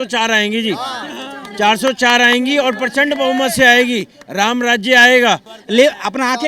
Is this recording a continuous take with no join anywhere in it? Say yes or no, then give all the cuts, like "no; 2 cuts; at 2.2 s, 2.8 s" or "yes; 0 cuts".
no; 1 cut; at 5.5 s